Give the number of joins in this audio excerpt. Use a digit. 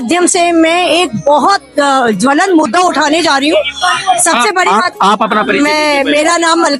0